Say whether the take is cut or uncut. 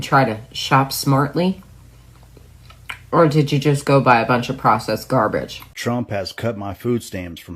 cut